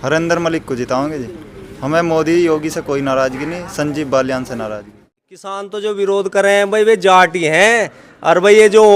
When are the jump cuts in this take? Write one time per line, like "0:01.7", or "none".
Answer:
0:05.5